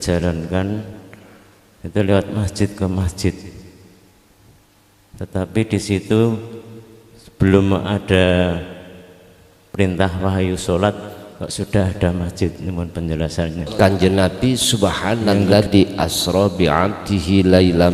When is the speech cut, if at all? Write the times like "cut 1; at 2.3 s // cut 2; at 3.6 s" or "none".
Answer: cut 1; at 13.7 s